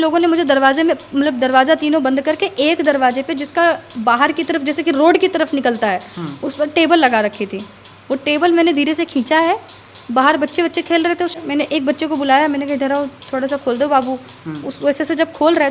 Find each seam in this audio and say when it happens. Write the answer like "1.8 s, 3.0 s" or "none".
11.3 s